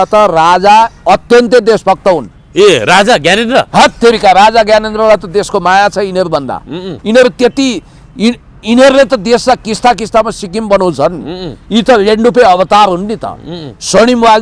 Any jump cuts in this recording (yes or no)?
no